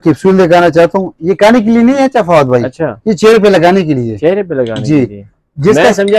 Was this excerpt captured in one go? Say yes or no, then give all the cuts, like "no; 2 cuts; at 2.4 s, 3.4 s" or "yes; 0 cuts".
yes; 0 cuts